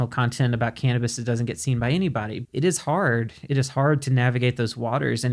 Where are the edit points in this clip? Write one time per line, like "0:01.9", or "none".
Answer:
0:02.3